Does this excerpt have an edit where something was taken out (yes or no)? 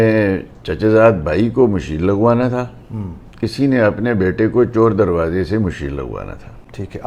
no